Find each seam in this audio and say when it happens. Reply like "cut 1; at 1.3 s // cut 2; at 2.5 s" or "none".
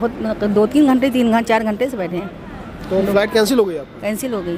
none